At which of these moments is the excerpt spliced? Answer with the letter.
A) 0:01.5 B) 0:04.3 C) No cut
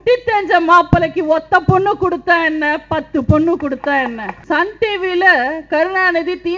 B